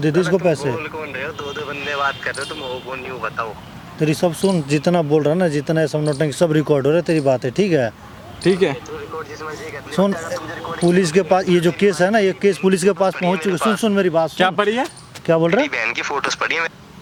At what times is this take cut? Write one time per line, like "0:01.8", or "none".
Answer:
none